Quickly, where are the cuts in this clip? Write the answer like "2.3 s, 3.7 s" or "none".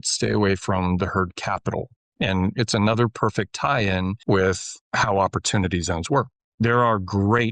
4.2 s, 6.3 s